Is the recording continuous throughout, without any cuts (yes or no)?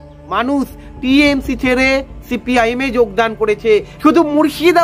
no